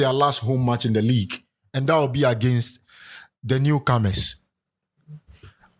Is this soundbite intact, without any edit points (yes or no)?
yes